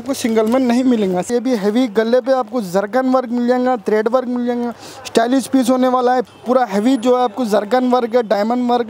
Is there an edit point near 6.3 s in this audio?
yes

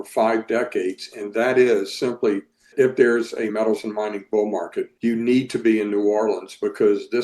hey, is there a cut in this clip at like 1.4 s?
no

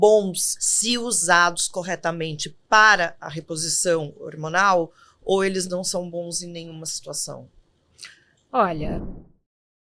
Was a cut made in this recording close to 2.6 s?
no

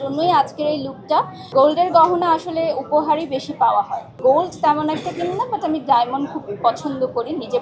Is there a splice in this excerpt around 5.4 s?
no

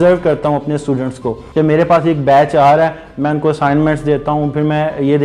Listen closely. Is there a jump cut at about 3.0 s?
no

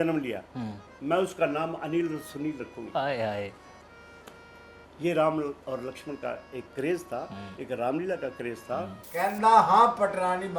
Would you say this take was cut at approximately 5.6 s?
no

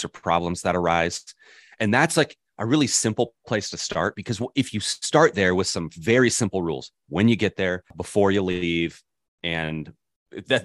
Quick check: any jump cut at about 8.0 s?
yes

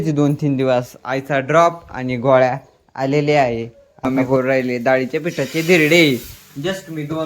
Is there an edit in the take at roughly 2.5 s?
no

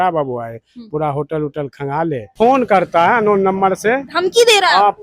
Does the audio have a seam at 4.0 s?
no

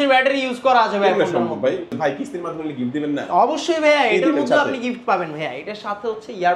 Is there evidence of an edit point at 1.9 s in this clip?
yes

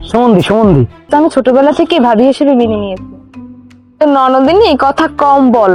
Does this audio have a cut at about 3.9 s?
no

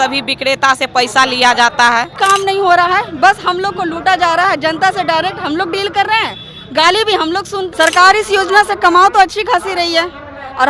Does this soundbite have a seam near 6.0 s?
no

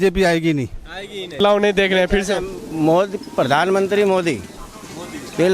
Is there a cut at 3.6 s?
no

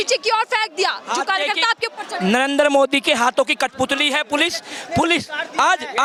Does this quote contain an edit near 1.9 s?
no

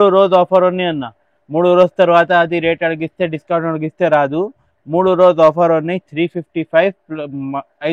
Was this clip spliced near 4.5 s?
no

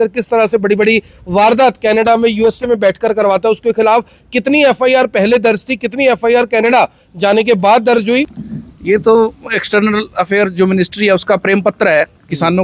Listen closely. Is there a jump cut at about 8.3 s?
yes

